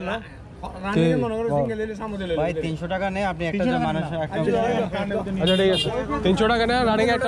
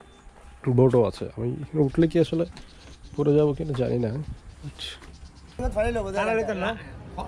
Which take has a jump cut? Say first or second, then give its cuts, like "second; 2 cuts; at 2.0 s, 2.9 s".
second; 1 cut; at 5.6 s